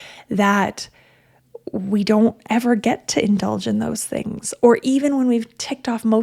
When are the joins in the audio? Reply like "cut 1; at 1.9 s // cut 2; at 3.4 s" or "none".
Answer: none